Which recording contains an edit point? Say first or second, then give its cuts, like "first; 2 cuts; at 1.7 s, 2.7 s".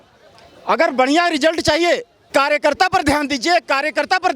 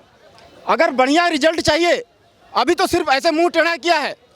first; 1 cut; at 2.3 s